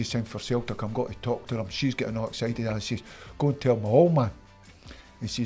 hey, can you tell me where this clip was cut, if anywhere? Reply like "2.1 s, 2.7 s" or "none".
none